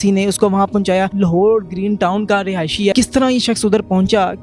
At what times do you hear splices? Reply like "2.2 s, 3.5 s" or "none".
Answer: 1.1 s, 2.9 s

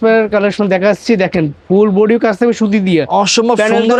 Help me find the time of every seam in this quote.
none

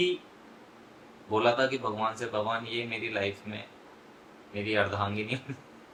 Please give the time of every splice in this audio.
none

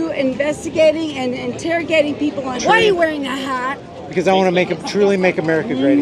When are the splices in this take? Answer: 2.6 s

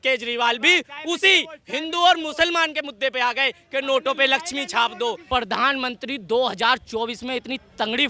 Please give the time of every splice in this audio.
5.2 s

